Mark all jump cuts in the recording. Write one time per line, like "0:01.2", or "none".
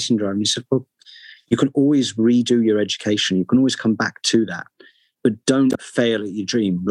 none